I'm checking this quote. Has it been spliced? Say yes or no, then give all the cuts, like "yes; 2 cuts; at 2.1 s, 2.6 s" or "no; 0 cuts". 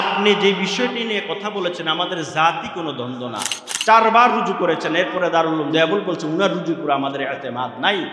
yes; 1 cut; at 3.7 s